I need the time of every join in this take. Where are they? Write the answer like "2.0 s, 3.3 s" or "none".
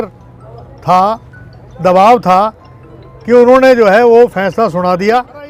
none

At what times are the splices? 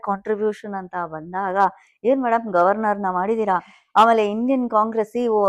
none

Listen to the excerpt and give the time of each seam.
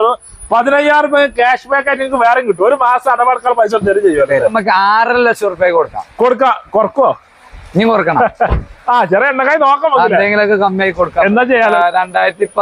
4.6 s, 11.7 s

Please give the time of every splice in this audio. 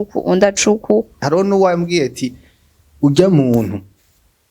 1.1 s

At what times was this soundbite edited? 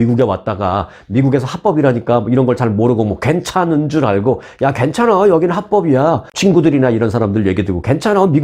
6.3 s

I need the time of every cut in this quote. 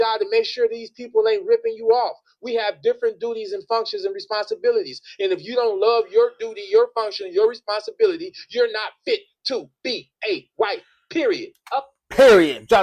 none

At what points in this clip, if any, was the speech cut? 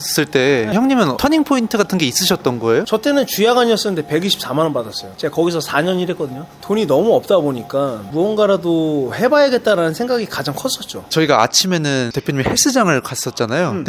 2.9 s, 11.0 s

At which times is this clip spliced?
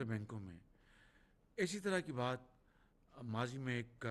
none

